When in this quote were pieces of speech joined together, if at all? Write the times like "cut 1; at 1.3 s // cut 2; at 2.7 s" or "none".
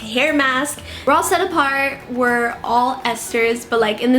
cut 1; at 1.0 s